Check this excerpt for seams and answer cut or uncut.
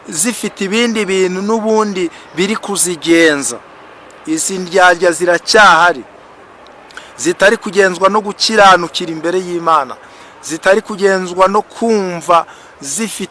uncut